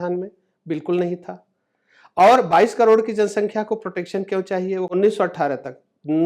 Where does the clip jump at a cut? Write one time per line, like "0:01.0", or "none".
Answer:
0:04.9